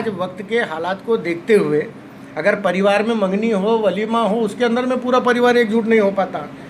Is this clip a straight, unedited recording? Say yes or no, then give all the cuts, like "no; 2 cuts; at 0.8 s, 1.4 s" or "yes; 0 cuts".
yes; 0 cuts